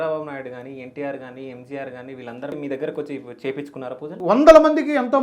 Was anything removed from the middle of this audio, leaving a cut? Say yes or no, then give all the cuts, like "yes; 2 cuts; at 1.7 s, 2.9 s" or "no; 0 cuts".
yes; 2 cuts; at 2.5 s, 4.1 s